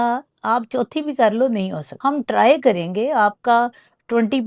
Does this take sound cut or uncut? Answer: cut